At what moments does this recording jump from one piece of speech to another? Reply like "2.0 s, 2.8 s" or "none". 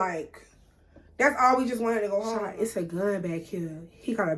2.3 s